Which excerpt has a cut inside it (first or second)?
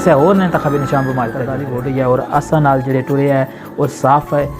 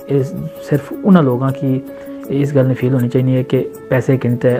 first